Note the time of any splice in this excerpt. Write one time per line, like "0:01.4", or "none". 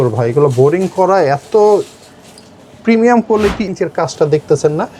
0:03.7